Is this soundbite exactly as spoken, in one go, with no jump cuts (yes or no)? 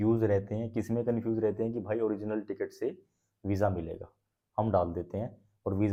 yes